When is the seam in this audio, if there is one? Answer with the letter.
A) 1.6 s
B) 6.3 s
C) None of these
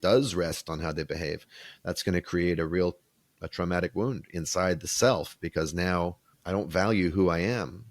B